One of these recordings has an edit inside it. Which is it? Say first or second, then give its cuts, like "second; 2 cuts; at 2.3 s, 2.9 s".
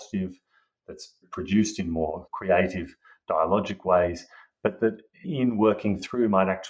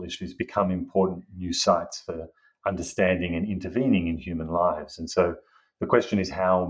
first; 3 cuts; at 1.2 s, 2.3 s, 5.3 s